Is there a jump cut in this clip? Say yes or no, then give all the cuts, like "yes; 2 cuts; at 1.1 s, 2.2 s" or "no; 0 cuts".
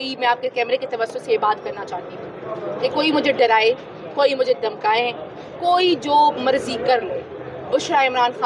no; 0 cuts